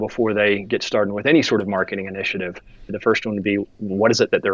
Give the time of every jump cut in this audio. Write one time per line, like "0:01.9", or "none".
0:02.9